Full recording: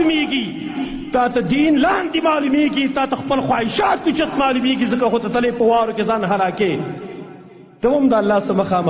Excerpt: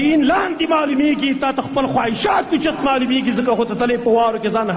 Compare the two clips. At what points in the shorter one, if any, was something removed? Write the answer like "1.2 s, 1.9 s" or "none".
none